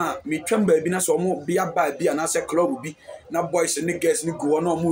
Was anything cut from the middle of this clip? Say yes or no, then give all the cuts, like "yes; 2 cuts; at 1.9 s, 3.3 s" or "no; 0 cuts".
no; 0 cuts